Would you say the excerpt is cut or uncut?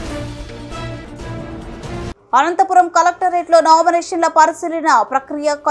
cut